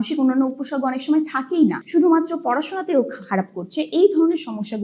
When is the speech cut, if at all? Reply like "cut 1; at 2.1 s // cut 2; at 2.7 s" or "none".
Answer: cut 1; at 1.8 s